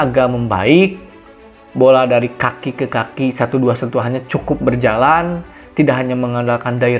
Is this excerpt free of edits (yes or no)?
yes